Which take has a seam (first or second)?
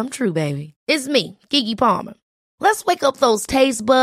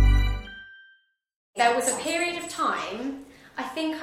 second